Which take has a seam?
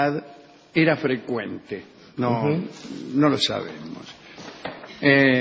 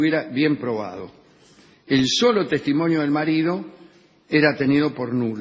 first; 1 cut; at 2.3 s

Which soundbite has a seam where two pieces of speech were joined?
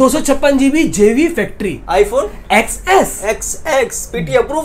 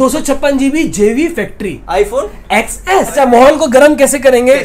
second; 1 cut; at 3.1 s

